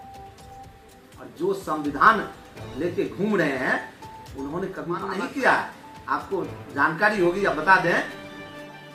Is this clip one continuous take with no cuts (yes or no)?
yes